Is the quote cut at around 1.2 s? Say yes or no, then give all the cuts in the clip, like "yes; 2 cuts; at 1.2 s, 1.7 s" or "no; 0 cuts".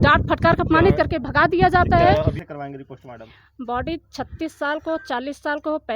no; 1 cut; at 2.4 s